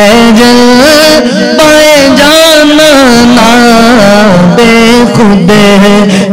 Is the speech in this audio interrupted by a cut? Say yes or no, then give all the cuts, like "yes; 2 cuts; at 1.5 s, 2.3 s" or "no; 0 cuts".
no; 0 cuts